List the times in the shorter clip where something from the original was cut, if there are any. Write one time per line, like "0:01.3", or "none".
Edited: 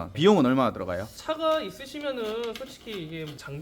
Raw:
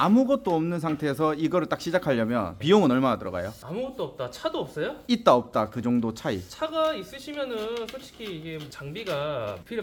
0:01.1

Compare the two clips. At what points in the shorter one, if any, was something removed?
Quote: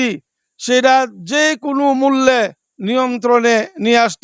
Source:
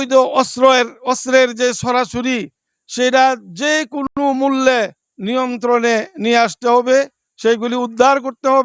0:01.8

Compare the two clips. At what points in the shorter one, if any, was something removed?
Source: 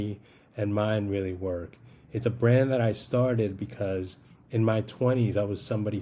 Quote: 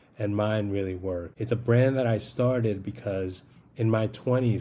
0:01.3

